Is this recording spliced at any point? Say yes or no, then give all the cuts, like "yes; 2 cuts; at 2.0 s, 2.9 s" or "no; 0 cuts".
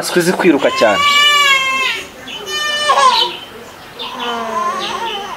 no; 0 cuts